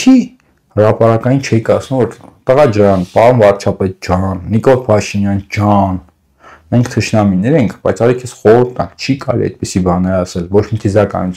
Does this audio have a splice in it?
no; 0 cuts

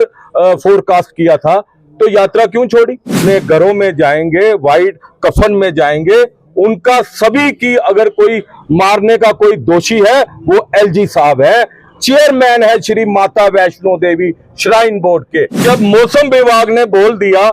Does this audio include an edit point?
yes; 2 cuts; at 3.2 s, 15.6 s

